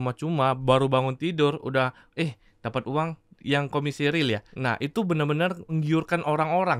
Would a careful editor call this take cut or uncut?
cut